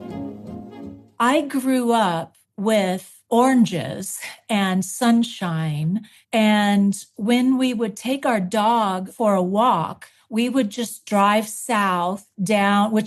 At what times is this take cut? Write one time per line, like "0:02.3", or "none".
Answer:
0:01.0